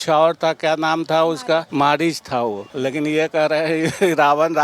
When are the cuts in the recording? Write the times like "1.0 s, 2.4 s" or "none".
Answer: 1.7 s, 2.7 s